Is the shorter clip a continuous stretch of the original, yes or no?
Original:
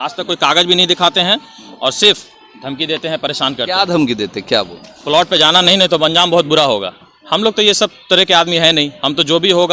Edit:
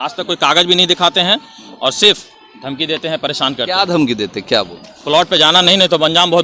yes